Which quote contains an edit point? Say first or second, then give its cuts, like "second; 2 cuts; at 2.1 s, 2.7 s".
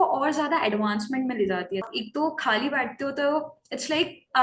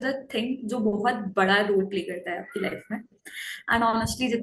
first; 1 cut; at 1.9 s